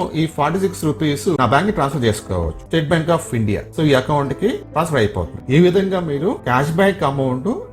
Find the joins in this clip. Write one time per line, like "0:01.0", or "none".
0:01.4
0:02.6
0:05.3